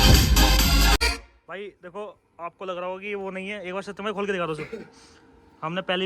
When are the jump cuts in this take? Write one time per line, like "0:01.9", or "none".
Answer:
0:01.0